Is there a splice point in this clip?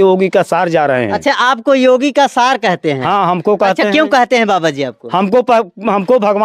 no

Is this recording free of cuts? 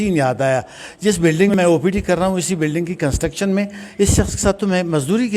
no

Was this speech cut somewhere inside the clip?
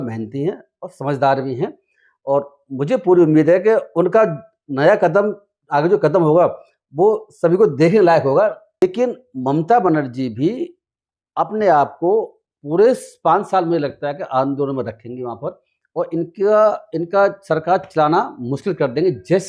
yes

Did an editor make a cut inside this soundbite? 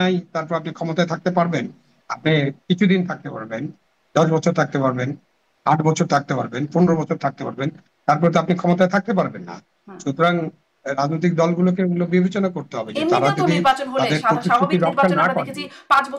no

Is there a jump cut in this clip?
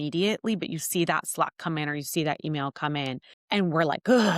yes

